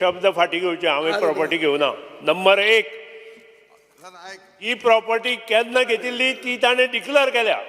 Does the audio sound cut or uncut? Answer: uncut